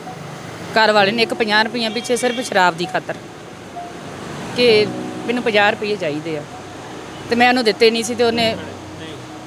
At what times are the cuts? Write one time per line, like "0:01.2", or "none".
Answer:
none